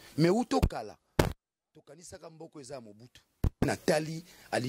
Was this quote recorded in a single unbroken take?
no; 1 cut; at 3.7 s

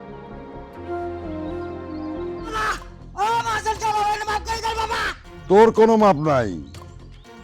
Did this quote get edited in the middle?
yes; 1 cut; at 2.5 s

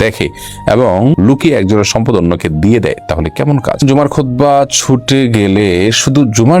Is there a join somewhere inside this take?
yes; 1 cut; at 3.8 s

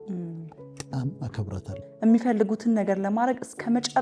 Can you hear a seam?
yes; 1 cut; at 1.8 s

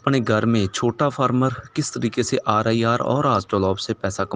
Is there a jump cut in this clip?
no; 0 cuts

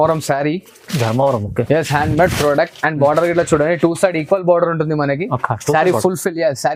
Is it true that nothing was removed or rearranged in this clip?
yes; 0 cuts

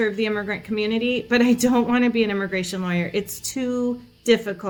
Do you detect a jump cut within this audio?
no; 0 cuts

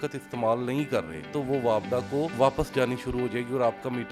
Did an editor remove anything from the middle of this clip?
yes; 2 cuts; at 1.4 s, 2.3 s

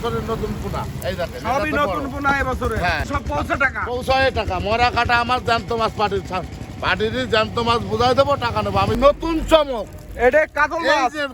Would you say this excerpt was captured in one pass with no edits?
no; 2 cuts; at 3.0 s, 9.0 s

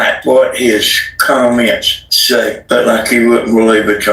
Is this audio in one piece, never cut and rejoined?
no; 1 cut; at 2.4 s

